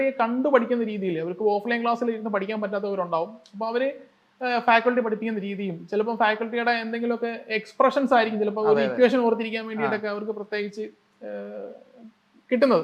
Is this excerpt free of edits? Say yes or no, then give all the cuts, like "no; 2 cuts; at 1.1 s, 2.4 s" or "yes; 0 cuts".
yes; 0 cuts